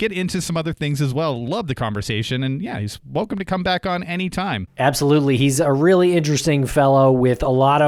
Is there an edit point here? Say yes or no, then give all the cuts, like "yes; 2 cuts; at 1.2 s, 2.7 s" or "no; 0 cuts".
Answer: no; 0 cuts